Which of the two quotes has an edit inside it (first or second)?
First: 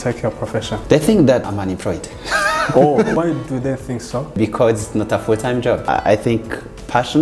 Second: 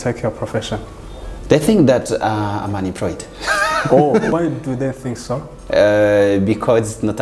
first